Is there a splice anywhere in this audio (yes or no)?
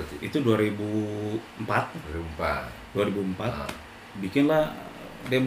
yes